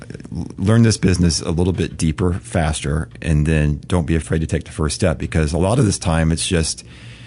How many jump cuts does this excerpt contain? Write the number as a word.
one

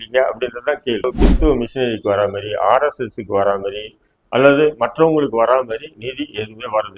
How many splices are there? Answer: one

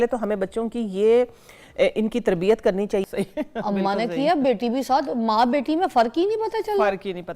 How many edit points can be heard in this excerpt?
one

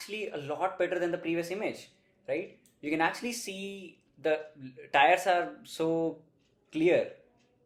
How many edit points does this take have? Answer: zero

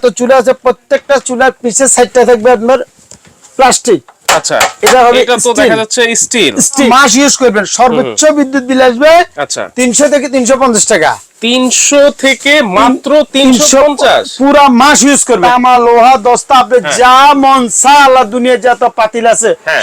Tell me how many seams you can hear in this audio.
two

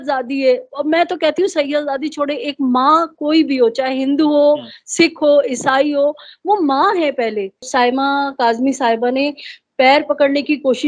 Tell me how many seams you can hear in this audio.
one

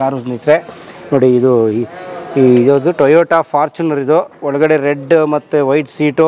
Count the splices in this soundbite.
zero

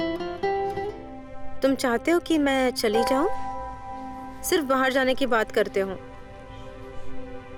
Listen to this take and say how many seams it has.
zero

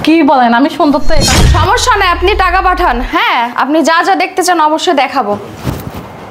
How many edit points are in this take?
one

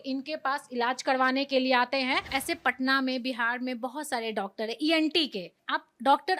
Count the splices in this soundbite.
two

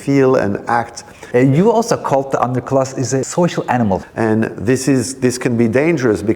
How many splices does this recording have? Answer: three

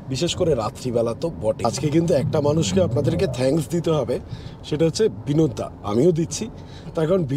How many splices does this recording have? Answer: one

